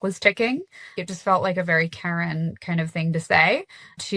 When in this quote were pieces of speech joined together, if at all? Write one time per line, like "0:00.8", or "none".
0:01.0

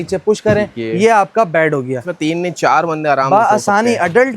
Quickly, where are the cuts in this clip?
0:02.1

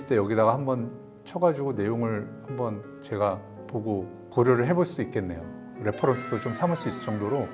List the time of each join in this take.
none

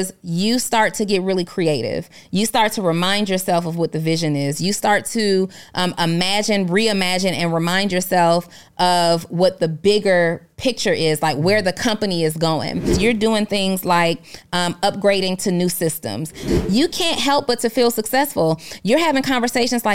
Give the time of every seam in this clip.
0:12.9
0:16.5

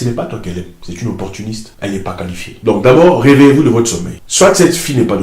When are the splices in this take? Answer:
none

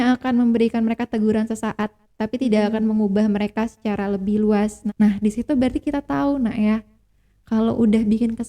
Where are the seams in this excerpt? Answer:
0:04.8

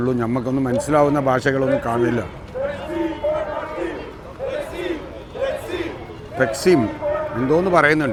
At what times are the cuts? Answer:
none

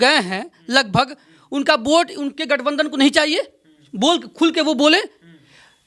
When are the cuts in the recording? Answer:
none

